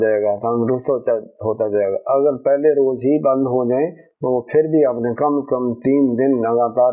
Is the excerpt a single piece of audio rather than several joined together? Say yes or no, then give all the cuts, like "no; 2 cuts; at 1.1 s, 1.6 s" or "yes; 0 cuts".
yes; 0 cuts